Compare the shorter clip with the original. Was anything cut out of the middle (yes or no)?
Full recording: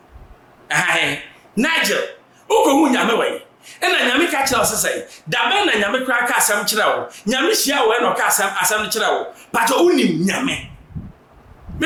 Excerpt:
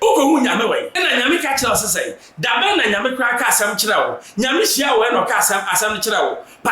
yes